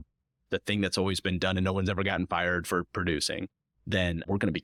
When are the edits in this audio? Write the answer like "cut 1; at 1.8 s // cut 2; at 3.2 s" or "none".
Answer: none